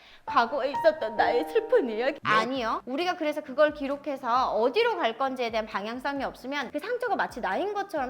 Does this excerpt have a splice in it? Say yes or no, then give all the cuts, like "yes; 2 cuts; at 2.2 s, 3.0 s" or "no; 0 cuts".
yes; 2 cuts; at 2.3 s, 6.7 s